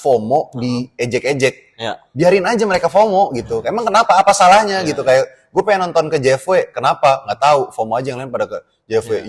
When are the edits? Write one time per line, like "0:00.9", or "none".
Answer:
none

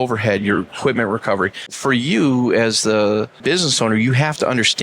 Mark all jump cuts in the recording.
0:01.7
0:03.4

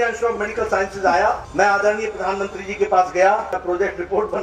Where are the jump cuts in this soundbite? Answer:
0:01.4
0:03.5

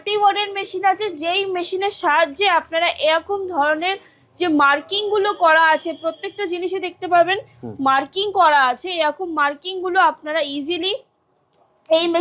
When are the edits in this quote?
none

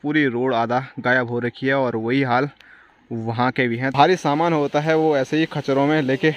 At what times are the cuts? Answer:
0:03.9

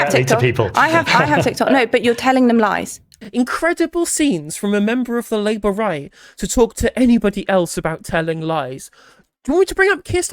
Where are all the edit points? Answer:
0:03.1

